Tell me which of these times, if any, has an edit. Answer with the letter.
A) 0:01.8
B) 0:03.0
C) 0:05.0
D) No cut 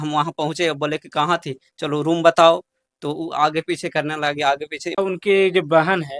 C